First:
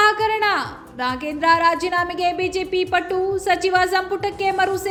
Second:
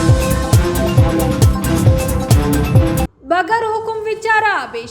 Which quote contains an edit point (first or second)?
second